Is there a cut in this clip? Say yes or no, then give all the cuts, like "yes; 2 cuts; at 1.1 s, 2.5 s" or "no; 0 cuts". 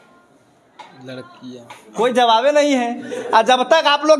no; 0 cuts